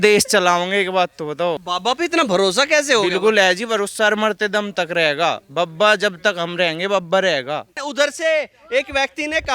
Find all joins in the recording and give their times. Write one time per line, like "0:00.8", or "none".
0:01.6
0:07.8